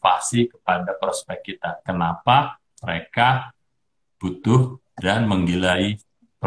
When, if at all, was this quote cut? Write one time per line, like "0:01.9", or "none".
none

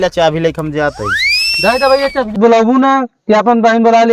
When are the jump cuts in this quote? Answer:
0:02.4

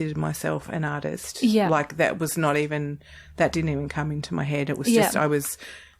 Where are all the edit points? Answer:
none

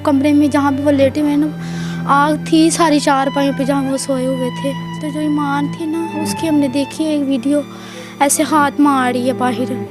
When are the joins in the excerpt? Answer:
0:05.0

